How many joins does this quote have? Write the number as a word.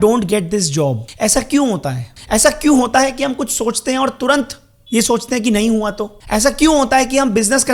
three